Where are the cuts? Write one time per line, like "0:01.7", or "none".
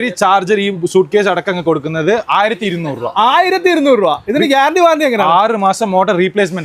none